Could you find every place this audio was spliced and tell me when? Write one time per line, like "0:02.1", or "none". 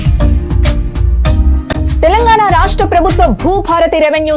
0:01.7